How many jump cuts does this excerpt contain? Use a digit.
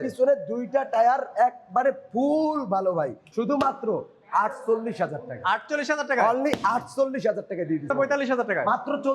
2